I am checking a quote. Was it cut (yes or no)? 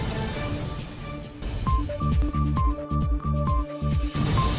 yes